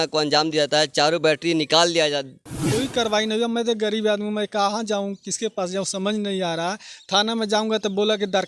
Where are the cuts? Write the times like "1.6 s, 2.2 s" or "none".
2.5 s